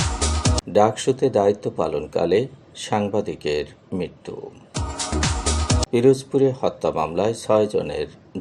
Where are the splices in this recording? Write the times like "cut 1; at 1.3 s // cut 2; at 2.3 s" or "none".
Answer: none